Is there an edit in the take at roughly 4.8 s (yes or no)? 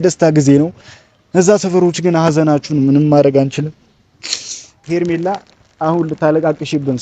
yes